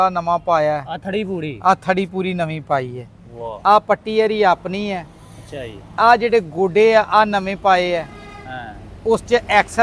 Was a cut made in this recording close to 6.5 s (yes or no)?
no